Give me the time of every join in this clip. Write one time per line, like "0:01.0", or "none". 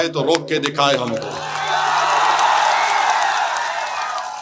none